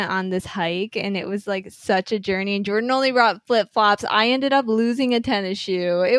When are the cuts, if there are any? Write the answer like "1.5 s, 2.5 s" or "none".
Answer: none